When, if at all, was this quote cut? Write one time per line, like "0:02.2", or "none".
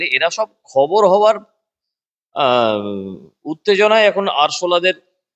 none